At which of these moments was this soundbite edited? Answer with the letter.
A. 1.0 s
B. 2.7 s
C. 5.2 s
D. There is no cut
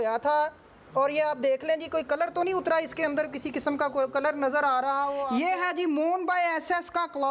C